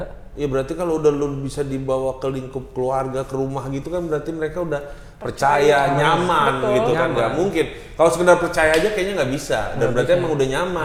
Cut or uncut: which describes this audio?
uncut